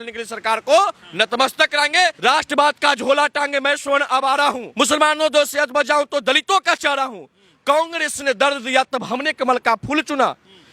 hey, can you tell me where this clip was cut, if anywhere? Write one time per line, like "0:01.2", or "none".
0:02.2
0:04.6